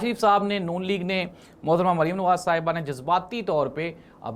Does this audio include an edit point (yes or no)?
no